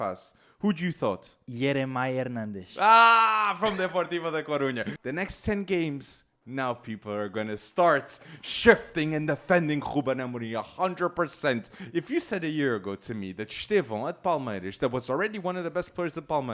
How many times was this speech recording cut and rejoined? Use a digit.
2